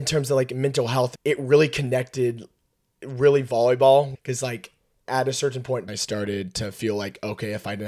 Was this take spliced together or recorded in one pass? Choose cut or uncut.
cut